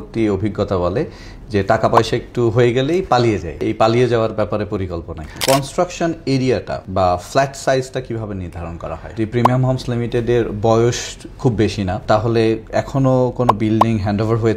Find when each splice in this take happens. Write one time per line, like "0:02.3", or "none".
0:03.7
0:05.3
0:06.8
0:09.1
0:12.0